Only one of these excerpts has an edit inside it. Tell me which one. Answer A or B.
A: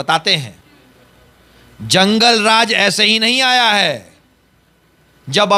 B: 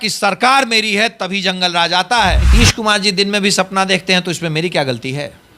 B